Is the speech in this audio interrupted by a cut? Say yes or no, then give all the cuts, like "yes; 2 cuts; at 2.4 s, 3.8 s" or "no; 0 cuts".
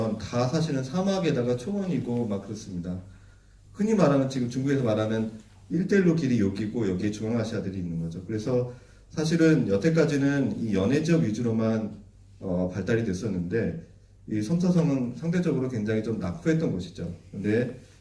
no; 0 cuts